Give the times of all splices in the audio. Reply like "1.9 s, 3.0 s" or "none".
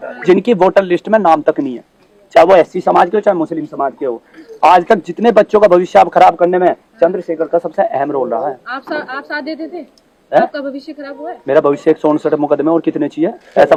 none